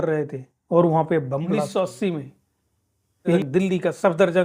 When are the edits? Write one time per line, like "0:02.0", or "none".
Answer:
0:01.5

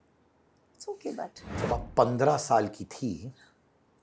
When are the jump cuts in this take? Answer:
0:01.4

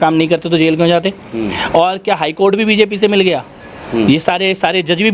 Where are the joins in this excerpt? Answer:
none

